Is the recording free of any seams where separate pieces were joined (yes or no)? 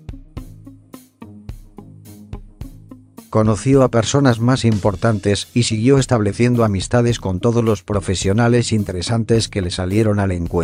yes